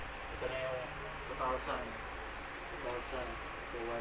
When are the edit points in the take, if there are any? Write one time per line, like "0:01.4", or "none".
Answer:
none